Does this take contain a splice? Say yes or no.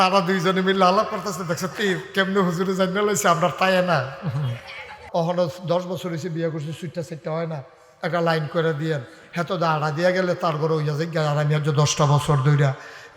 yes